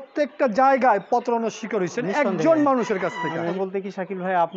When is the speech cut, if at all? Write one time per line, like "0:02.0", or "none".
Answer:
0:03.5